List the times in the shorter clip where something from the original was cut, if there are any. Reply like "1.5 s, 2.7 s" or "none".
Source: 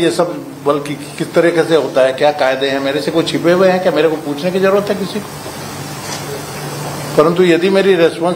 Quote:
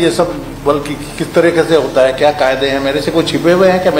none